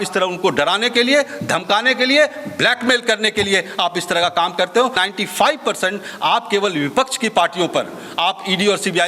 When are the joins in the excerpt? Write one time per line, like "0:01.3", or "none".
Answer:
0:04.9